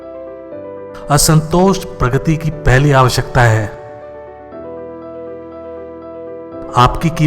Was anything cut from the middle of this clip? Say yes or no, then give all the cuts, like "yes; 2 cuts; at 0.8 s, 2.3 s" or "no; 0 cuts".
yes; 1 cut; at 0.9 s